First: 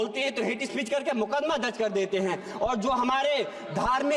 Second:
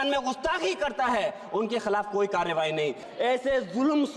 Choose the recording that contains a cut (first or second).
second